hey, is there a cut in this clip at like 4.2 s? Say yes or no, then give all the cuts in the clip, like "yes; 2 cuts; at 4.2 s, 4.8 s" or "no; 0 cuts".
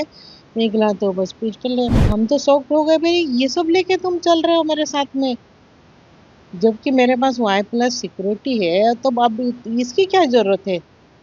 no; 1 cut; at 2.0 s